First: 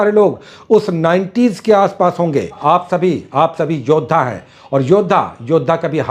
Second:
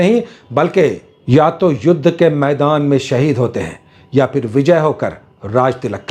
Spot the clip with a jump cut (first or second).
first